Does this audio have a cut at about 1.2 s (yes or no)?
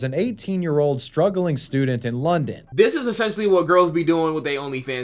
no